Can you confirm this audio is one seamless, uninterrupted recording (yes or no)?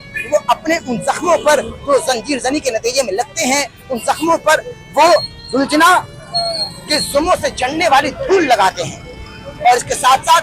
yes